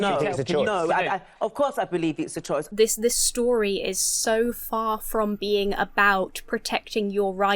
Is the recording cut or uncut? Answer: cut